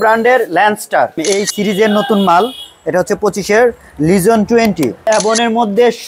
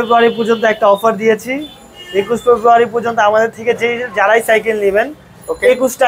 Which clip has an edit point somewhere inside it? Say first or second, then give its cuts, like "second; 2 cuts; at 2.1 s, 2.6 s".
first; 2 cuts; at 1.2 s, 5.0 s